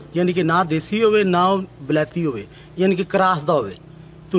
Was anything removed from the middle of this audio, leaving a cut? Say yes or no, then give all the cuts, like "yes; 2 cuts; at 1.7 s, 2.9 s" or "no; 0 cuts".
no; 0 cuts